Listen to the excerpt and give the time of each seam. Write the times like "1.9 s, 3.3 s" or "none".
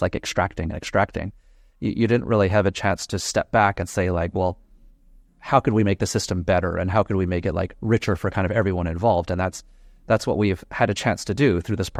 none